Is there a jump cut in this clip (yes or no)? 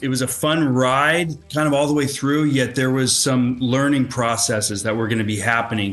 no